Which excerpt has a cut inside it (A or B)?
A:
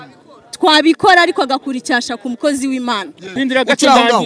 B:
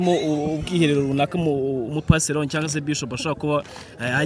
A